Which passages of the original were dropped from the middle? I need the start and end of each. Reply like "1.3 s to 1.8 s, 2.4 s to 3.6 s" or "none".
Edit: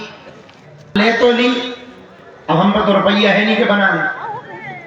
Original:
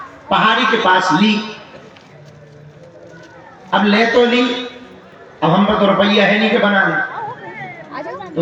2.4 s to 3.9 s